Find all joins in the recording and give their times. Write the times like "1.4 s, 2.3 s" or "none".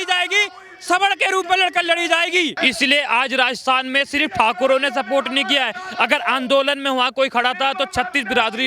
2.6 s